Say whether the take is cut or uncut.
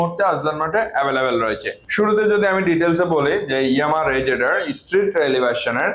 uncut